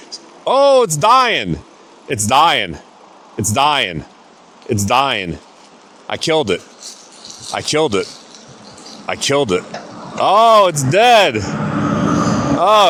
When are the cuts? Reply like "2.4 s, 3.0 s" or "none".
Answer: none